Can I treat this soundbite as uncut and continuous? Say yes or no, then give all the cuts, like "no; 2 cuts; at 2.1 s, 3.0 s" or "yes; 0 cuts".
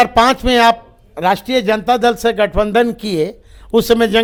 yes; 0 cuts